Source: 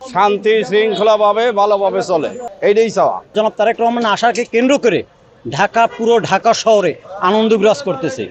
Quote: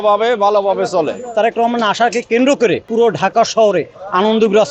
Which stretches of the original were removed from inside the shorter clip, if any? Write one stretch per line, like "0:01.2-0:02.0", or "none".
0:02.5-0:03.5
0:05.1-0:06.0